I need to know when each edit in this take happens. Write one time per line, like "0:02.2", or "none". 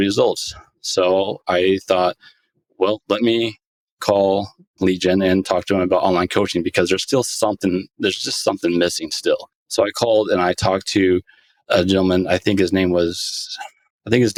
none